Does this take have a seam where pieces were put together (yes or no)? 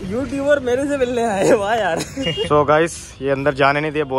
yes